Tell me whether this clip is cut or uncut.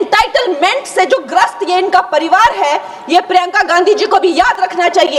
uncut